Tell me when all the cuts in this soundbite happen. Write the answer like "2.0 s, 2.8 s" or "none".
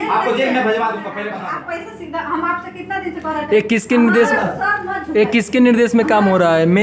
1.3 s